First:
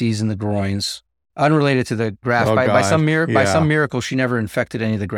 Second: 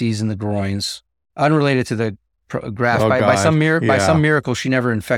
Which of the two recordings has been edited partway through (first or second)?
first